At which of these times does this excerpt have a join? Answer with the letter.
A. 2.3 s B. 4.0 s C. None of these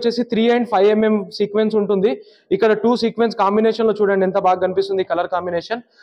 C